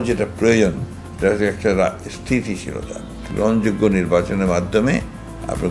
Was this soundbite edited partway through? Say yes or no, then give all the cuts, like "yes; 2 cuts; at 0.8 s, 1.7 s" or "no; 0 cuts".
yes; 1 cut; at 3.2 s